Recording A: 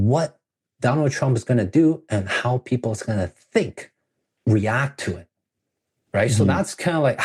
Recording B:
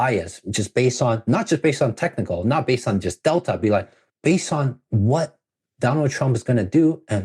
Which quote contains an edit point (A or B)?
B